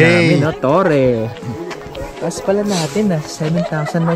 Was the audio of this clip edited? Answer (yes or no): yes